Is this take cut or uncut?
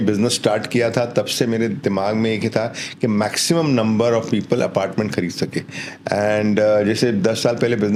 uncut